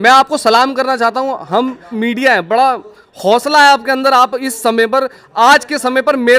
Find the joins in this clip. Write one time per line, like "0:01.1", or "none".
0:01.9